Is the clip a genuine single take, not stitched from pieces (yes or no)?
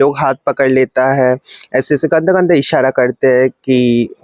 yes